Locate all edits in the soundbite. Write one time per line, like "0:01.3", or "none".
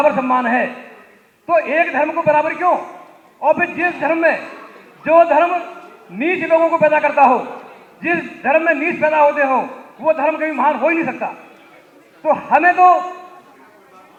none